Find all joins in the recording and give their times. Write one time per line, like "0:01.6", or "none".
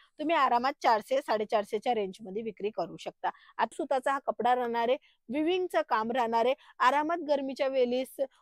0:03.7